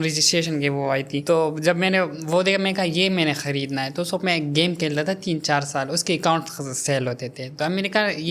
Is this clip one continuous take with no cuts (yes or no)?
yes